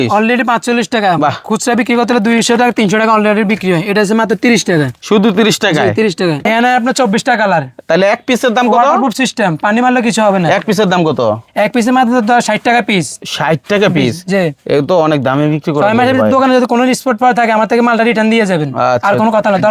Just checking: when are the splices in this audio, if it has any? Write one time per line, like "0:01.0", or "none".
0:06.5